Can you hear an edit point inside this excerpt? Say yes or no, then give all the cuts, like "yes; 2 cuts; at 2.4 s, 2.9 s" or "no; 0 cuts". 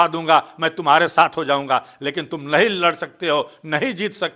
no; 0 cuts